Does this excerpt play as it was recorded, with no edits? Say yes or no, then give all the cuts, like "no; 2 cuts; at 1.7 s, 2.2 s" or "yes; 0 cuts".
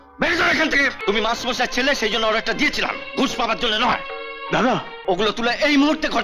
no; 2 cuts; at 1.0 s, 4.9 s